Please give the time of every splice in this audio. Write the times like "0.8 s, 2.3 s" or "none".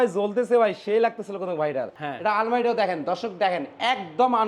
1.9 s